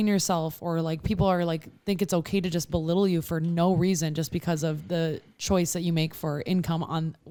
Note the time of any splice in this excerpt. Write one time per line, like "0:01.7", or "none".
none